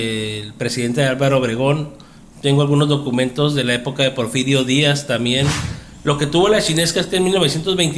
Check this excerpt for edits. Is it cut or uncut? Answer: cut